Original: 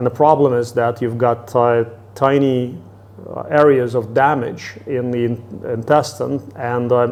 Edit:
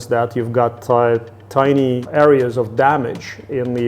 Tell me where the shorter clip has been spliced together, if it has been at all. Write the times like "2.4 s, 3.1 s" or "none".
2.0 s